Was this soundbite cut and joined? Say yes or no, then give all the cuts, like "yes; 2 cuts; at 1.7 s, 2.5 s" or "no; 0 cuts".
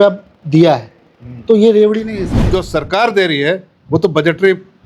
yes; 1 cut; at 2.5 s